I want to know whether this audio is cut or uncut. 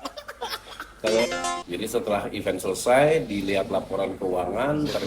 cut